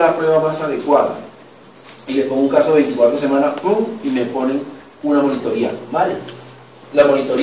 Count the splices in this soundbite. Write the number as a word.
one